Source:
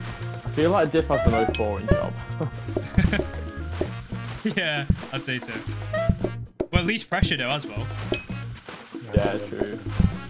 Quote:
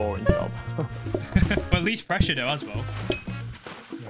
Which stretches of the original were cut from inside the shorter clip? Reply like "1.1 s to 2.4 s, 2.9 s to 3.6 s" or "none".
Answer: 3.3 s to 6.7 s